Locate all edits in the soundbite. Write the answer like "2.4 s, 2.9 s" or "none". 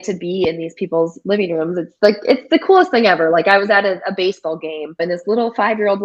5.0 s

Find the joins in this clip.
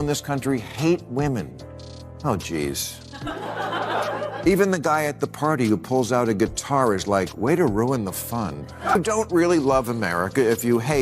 8.7 s

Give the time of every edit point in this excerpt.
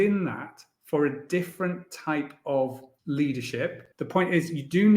2.9 s, 3.9 s

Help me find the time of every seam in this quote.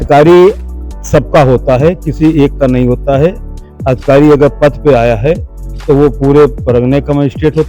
none

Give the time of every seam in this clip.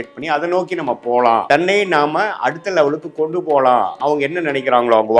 1.4 s, 3.9 s

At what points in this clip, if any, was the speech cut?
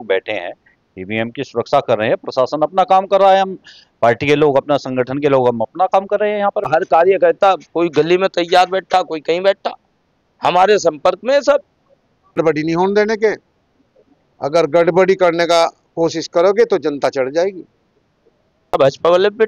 6.7 s, 12.4 s, 18.7 s

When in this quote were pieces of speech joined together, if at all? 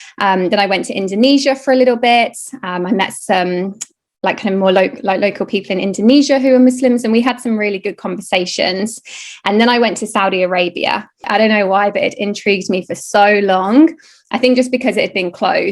11.2 s

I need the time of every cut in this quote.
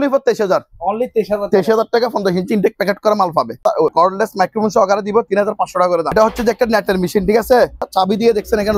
3.8 s, 6.1 s, 7.9 s

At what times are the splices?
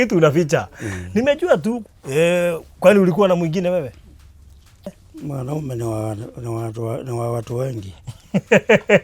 1.9 s, 5.0 s

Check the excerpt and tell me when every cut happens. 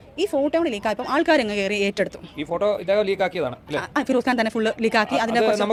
none

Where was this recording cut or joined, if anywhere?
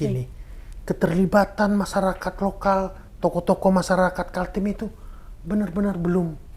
none

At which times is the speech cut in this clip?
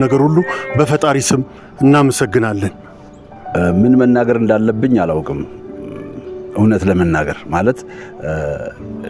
none

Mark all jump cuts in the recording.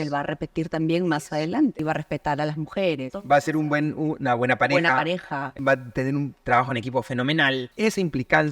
1.8 s, 3.1 s, 5.6 s, 7.7 s

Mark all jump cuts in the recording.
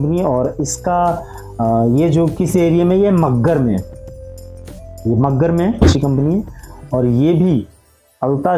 5.9 s

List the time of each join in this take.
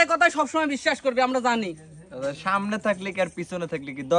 none

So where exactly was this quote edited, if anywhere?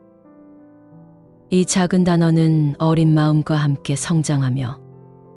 none

